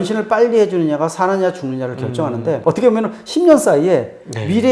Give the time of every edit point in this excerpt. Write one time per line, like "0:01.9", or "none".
0:02.6